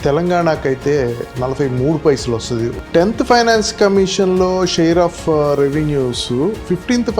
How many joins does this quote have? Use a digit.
1